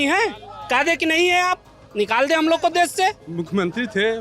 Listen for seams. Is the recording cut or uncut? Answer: cut